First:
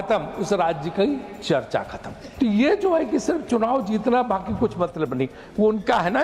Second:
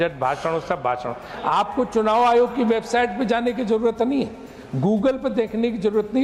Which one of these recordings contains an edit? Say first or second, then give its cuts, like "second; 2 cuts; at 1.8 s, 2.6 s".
first; 1 cut; at 2.2 s